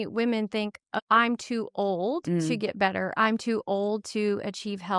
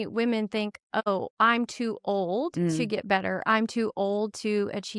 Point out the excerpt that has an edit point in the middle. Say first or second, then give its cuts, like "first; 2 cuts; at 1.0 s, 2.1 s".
first; 1 cut; at 1.0 s